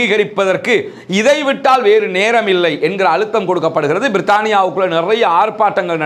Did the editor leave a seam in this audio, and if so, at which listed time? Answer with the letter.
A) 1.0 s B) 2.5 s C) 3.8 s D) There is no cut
D